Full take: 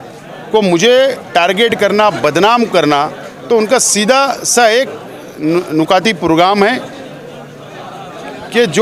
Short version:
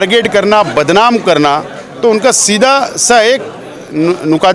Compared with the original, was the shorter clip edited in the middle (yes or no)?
no